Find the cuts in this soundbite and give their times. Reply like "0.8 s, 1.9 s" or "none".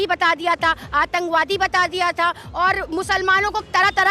none